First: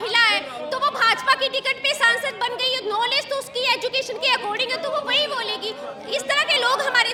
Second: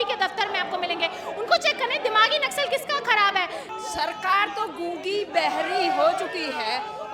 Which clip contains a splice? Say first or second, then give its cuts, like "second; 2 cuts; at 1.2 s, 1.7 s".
second; 1 cut; at 3.6 s